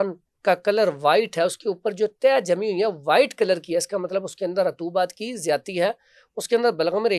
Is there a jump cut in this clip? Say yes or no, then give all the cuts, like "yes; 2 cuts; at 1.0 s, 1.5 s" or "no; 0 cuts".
no; 0 cuts